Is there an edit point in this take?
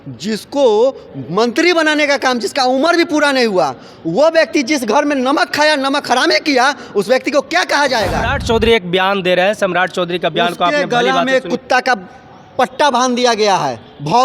yes; 1 cut; at 8.3 s

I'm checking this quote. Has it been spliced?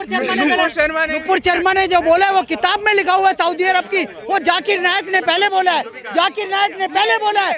no; 0 cuts

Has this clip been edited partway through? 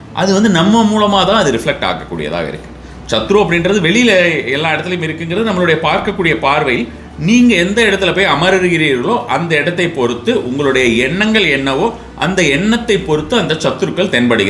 no; 0 cuts

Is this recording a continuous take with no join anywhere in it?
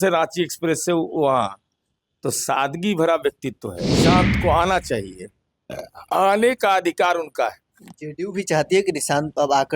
no; 1 cut; at 4.0 s

